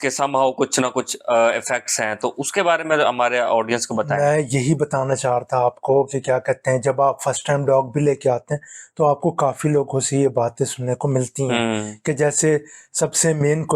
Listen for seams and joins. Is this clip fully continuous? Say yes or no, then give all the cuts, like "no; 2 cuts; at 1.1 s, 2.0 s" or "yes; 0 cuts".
yes; 0 cuts